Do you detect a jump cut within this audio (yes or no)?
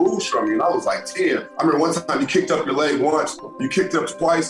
yes